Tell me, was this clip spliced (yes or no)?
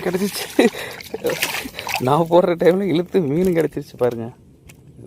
yes